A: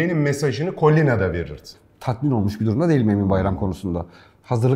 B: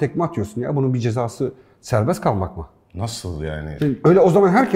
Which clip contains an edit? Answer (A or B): A